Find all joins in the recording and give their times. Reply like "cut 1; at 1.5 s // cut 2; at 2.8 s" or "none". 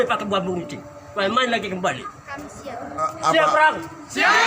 cut 1; at 3.1 s